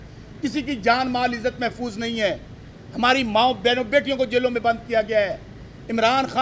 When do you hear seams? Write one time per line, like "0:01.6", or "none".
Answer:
none